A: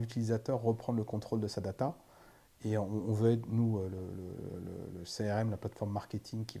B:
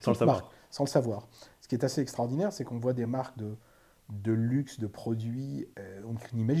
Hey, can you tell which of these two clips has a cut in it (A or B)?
B